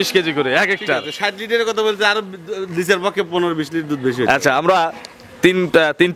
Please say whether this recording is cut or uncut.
uncut